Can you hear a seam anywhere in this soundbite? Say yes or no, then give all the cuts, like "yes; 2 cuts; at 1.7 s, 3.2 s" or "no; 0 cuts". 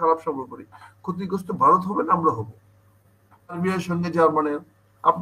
yes; 1 cut; at 3.6 s